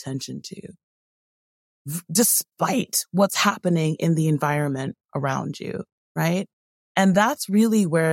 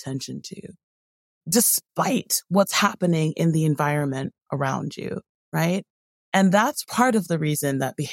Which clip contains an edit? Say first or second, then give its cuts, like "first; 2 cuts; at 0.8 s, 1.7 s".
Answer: second; 2 cuts; at 1.4 s, 6.8 s